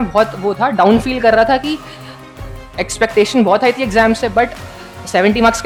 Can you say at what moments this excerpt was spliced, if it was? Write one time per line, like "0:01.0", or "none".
none

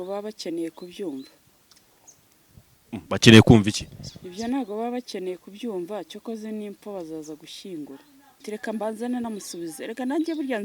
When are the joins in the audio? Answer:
0:08.5

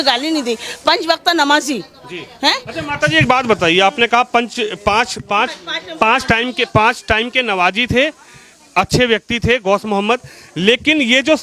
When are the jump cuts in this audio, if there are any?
none

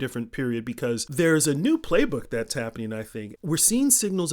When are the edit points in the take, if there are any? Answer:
0:01.1
0:03.3

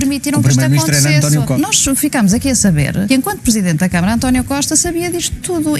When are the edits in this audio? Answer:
0:01.5
0:03.1

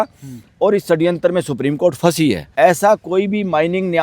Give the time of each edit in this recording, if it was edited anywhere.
0:02.5

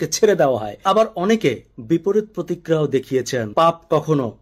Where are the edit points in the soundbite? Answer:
0:00.8
0:03.5

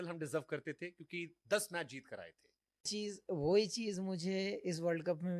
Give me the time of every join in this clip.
0:02.9

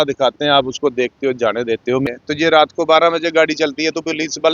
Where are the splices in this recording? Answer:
0:02.1

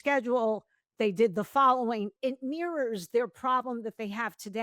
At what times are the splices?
0:02.1

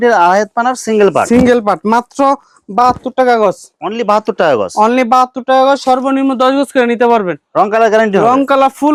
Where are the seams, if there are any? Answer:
none

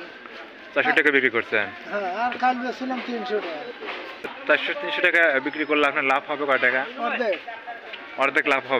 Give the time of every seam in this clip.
0:04.4

